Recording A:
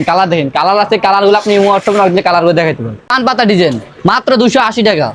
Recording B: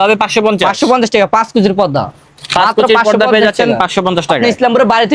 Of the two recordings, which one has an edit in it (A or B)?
A